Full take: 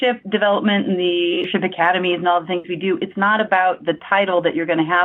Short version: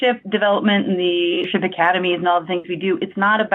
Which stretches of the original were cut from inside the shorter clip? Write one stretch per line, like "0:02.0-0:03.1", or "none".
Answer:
none